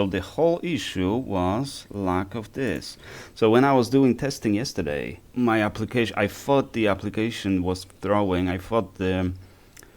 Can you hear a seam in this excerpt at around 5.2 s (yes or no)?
yes